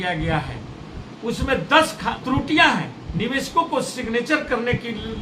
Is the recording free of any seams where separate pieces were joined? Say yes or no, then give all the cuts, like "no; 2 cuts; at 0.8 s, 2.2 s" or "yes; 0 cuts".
no; 2 cuts; at 2.2 s, 3.0 s